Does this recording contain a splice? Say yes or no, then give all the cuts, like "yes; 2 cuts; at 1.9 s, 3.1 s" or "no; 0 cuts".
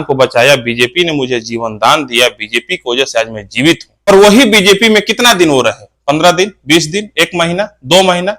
yes; 1 cut; at 4.1 s